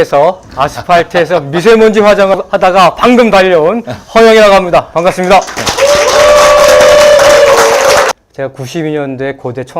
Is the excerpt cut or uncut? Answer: cut